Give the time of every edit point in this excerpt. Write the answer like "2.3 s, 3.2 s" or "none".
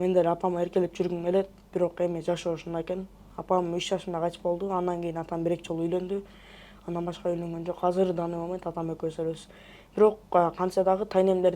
none